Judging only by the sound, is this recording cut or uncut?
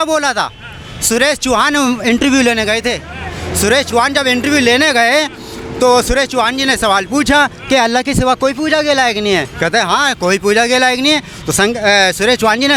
uncut